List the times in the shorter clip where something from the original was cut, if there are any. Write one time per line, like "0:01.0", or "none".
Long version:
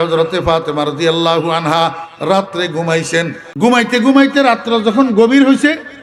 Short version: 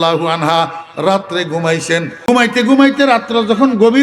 0:02.3

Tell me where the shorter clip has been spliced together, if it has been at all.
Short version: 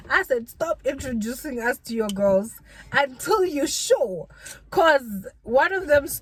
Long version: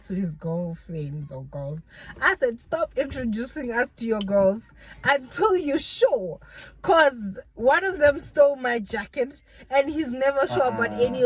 none

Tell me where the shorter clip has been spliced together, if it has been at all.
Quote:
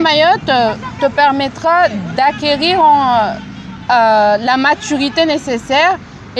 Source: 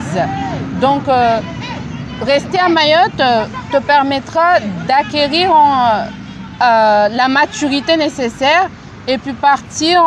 none

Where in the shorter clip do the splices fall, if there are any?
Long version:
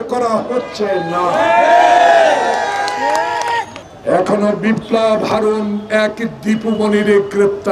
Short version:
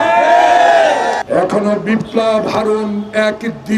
0:01.2

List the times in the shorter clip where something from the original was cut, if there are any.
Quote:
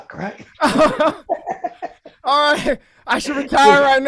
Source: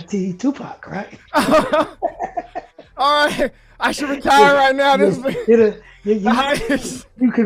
none

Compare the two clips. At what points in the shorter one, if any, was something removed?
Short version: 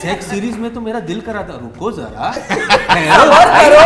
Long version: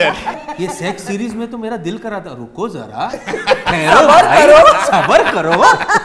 none

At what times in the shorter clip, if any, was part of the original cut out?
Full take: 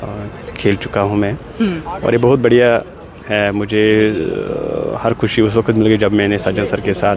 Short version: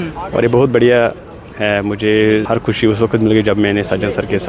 0:02.4

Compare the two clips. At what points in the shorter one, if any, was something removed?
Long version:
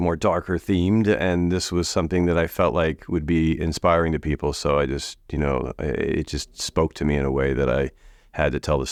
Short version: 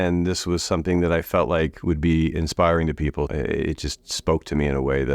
0:03.3

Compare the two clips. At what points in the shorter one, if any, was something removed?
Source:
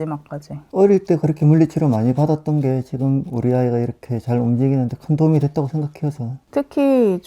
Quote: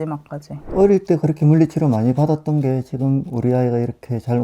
none

